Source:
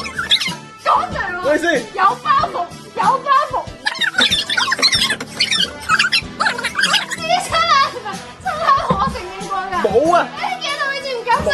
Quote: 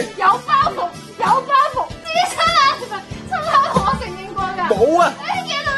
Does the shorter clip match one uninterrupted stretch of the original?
no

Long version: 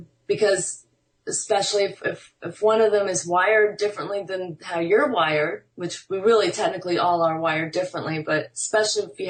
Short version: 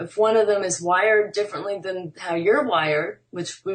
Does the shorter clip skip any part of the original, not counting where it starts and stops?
no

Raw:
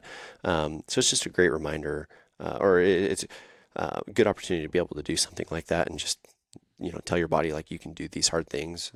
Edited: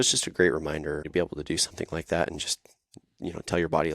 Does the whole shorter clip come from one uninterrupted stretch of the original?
no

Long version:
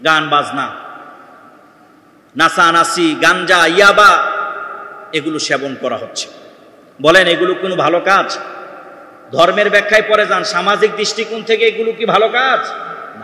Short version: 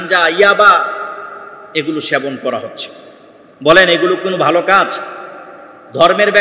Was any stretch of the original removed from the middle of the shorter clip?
no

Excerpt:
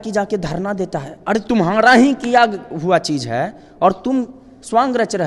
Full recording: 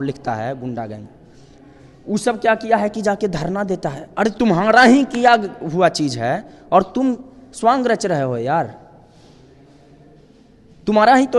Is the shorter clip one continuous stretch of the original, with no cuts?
yes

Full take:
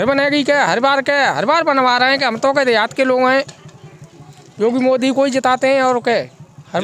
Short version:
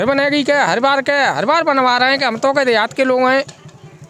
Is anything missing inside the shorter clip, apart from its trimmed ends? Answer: no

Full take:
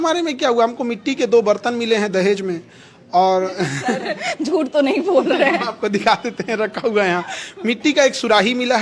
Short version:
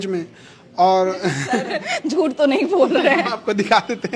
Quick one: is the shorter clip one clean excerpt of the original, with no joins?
yes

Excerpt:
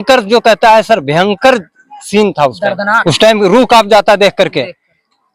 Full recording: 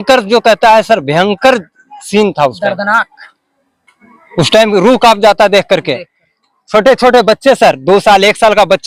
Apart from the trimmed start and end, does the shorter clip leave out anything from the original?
yes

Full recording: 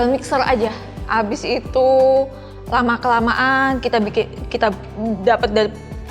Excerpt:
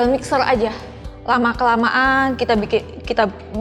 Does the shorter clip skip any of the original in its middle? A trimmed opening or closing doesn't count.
yes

